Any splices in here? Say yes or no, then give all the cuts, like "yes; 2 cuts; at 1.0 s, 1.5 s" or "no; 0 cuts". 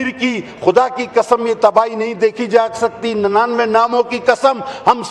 no; 0 cuts